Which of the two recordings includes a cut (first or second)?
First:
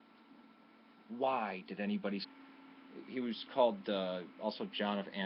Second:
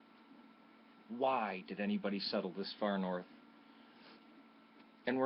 second